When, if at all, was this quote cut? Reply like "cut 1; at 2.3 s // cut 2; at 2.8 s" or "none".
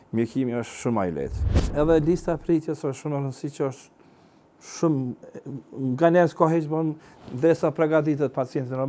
cut 1; at 1.7 s